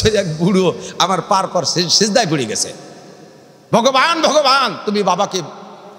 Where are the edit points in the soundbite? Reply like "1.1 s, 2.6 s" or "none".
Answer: none